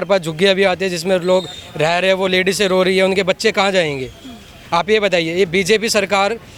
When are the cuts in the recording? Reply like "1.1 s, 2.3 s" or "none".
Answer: none